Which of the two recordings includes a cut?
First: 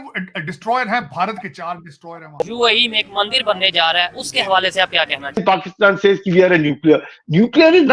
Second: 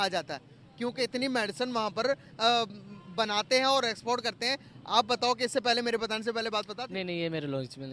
first; 2 cuts; at 2.4 s, 5.4 s

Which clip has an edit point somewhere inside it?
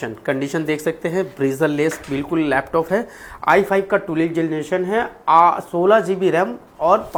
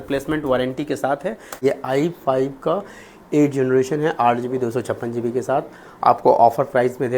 second; 1 cut; at 1.6 s

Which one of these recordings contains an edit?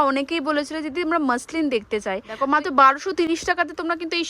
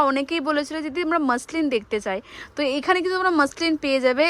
first; 1 cut; at 2.4 s

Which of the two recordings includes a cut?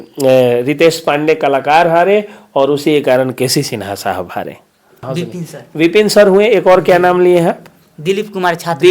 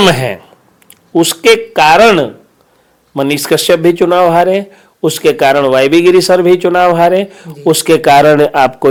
first; 1 cut; at 5.1 s

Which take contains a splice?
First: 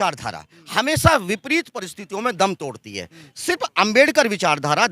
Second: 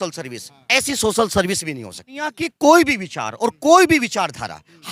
second; 1 cut; at 2.4 s

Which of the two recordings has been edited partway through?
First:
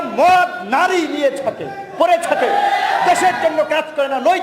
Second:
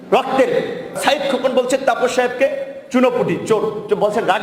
second; 1 cut; at 1.0 s

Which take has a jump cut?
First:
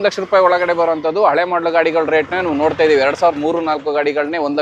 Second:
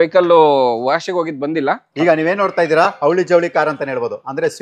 second; 1 cut; at 1.9 s

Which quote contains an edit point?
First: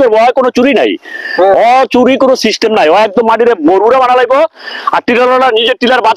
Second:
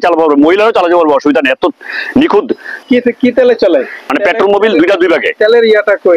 second; 2 cuts; at 2.8 s, 4.1 s

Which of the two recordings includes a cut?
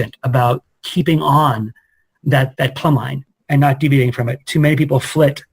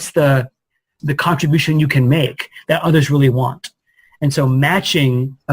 second; 1 cut; at 0.9 s

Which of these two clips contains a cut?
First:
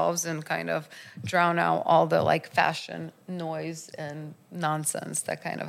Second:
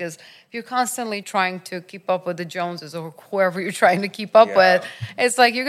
second; 1 cut; at 1.2 s

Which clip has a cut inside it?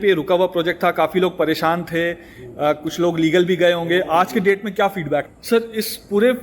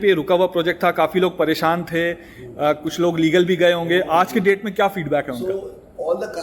first; 1 cut; at 5.3 s

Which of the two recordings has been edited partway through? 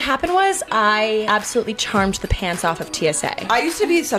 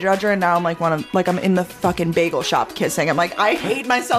first; 2 cuts; at 1.3 s, 3.4 s

